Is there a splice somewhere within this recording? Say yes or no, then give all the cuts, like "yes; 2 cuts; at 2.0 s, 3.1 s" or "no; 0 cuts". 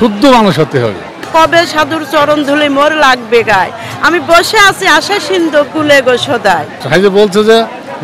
yes; 2 cuts; at 1.3 s, 6.7 s